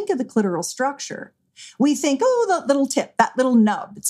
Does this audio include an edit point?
no; 0 cuts

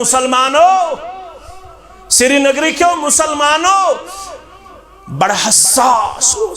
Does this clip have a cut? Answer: no; 0 cuts

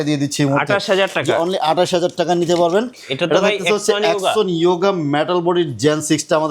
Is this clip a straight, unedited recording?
no; 1 cut; at 2.9 s

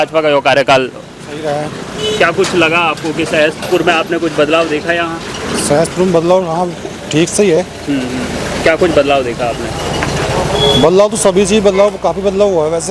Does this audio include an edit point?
no; 0 cuts

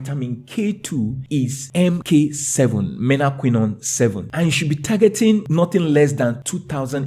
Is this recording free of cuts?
no; 1 cut; at 5.5 s

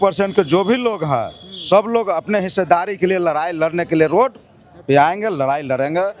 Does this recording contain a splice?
no; 0 cuts

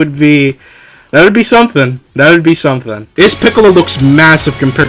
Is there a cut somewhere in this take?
yes; 1 cut; at 3.0 s

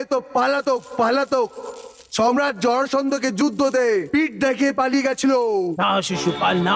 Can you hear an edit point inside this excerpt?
no; 0 cuts

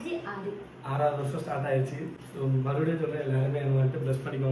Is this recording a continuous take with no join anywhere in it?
yes; 0 cuts

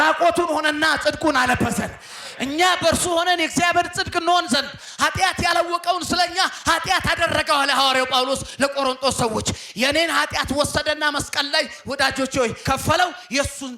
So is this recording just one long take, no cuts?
no; 1 cut; at 12.6 s

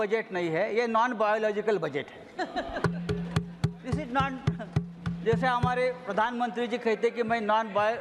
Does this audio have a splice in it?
no; 0 cuts

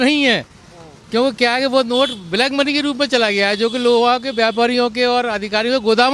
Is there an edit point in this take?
no; 0 cuts

